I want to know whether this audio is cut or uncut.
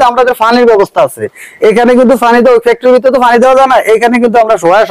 uncut